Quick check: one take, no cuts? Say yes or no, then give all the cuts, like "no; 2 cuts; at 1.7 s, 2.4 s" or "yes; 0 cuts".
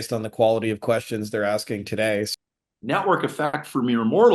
no; 1 cut; at 2.3 s